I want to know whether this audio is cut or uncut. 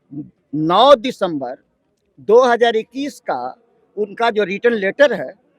uncut